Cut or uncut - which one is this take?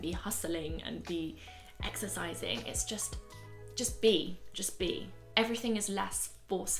cut